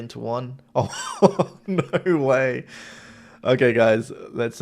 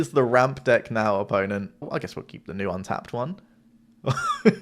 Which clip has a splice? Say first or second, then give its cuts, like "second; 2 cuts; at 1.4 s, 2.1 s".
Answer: second; 1 cut; at 1.9 s